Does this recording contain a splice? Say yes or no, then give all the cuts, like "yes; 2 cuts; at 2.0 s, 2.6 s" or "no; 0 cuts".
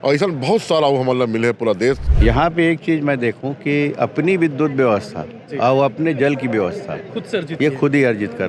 yes; 1 cut; at 2.1 s